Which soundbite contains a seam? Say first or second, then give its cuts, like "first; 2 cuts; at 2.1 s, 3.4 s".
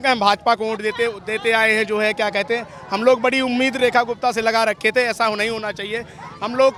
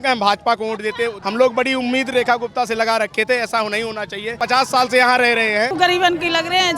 second; 3 cuts; at 1.2 s, 4.3 s, 5.7 s